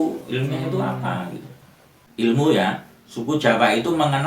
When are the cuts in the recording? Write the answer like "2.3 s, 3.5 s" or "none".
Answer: 2.0 s